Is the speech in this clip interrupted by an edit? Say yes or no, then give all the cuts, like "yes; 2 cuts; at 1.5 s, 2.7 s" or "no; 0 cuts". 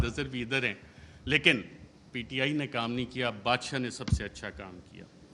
no; 0 cuts